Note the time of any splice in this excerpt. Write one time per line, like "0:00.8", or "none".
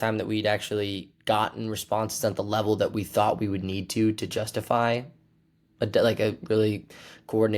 none